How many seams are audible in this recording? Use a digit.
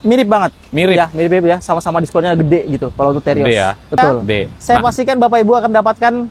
1